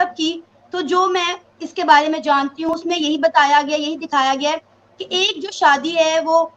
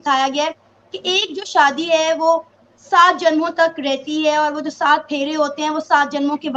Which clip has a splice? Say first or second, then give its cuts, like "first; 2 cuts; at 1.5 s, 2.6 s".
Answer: first; 1 cut; at 2.8 s